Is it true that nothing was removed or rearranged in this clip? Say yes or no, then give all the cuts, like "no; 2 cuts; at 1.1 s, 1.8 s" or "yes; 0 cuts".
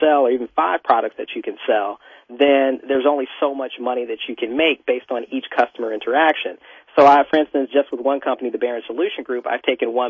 yes; 0 cuts